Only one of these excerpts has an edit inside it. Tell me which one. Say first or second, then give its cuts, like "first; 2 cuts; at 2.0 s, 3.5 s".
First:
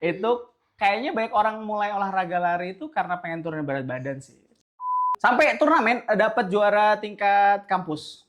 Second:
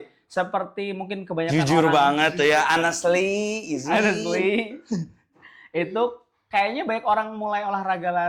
first; 1 cut; at 4.8 s